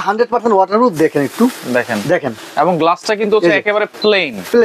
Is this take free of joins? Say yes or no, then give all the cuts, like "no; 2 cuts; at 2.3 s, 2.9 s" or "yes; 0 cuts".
yes; 0 cuts